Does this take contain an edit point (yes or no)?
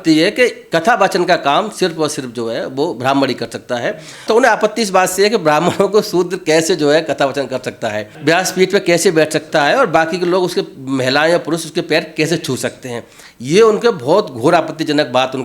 yes